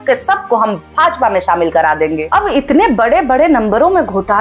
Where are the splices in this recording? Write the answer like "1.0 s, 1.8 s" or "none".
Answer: 2.2 s